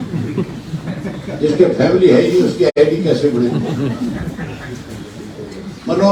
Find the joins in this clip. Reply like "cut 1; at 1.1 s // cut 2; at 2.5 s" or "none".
none